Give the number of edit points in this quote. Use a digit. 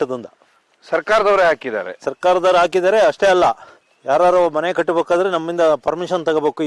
0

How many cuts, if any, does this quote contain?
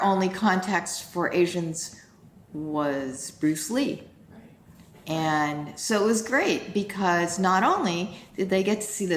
1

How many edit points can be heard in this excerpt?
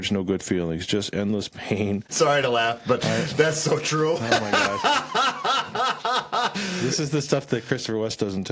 1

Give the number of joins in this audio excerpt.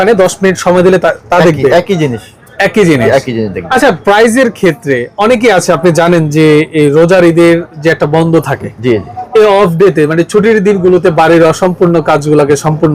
0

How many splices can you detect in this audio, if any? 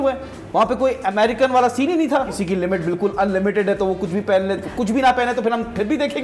1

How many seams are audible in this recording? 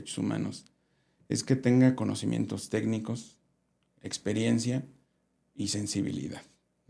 0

